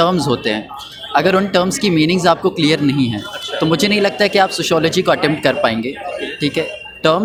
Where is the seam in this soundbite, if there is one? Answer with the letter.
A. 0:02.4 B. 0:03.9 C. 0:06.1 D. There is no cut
D